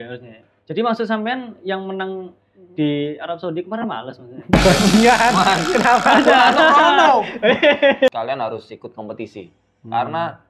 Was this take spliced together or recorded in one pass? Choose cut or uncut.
cut